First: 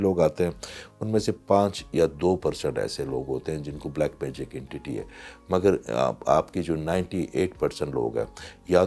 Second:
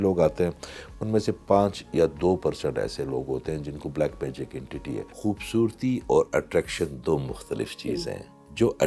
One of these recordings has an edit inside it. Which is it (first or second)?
second